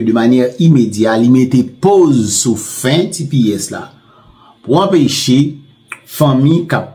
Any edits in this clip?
no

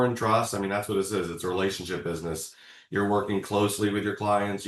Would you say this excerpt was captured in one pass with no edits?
yes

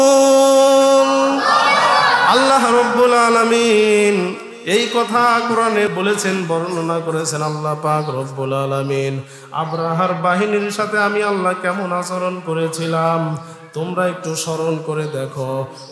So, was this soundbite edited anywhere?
yes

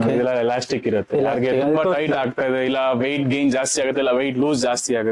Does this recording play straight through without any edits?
yes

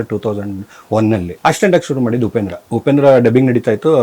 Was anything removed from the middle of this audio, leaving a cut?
yes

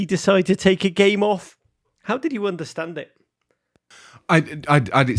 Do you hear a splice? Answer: no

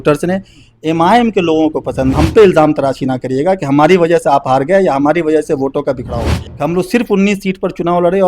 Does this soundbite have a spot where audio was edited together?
yes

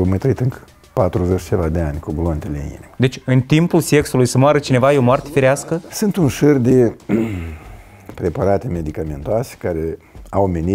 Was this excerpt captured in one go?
no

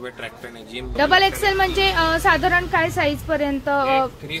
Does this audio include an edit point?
yes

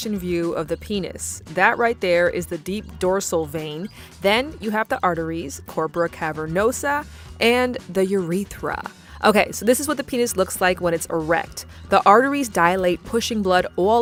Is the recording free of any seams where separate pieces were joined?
yes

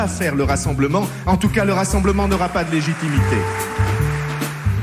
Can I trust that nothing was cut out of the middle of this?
no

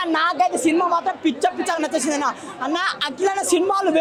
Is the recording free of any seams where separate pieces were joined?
yes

